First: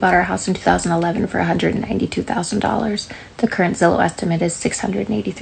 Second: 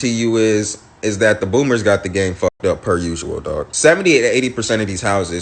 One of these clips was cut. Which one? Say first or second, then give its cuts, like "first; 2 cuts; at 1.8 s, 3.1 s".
second; 1 cut; at 3.4 s